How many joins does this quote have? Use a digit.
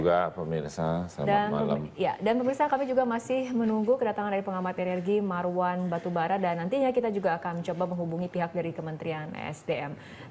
1